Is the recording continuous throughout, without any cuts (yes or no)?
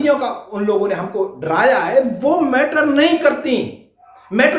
yes